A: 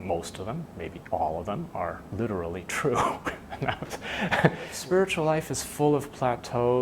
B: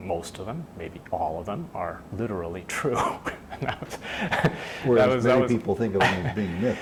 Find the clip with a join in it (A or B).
A